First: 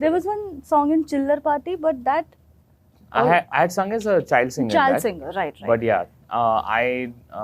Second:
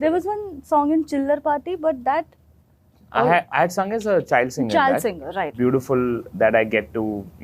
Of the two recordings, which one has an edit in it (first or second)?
second